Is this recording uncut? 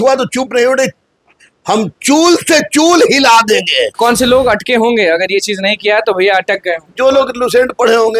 no; 1 cut; at 4.0 s

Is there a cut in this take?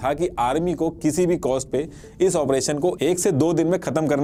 no; 0 cuts

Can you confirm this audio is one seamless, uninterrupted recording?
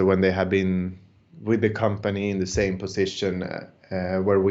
yes; 0 cuts

